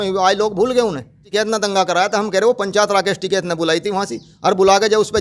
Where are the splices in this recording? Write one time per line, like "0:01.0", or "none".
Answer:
0:01.3